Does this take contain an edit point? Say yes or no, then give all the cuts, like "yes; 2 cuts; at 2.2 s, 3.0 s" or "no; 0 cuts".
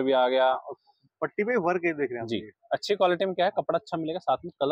no; 0 cuts